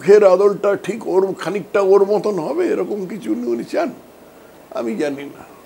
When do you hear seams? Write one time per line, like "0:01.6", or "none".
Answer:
none